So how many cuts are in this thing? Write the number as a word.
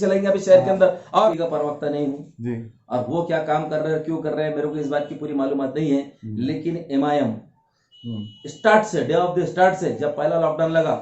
one